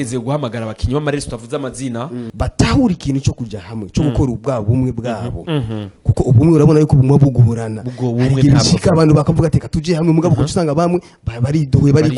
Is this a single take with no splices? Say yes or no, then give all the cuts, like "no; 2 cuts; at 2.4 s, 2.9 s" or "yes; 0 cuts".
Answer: no; 1 cut; at 2.3 s